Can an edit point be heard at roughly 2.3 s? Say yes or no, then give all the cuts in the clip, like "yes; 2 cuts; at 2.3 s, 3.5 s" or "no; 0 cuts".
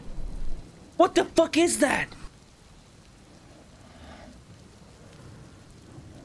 yes; 1 cut; at 2.3 s